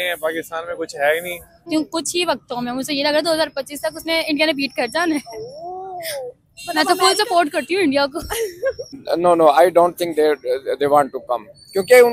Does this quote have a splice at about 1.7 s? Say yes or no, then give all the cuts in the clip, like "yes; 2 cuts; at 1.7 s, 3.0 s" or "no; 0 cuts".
yes; 2 cuts; at 1.7 s, 8.9 s